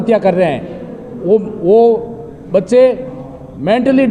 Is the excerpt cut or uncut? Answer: uncut